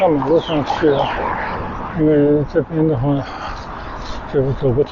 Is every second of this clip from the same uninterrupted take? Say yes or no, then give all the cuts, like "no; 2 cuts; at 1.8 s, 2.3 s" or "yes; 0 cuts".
yes; 0 cuts